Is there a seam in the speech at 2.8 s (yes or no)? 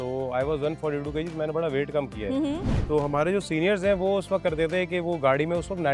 yes